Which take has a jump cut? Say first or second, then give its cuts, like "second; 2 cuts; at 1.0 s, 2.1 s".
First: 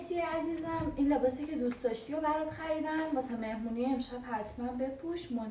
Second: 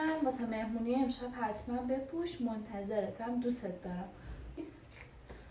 second; 1 cut; at 4.6 s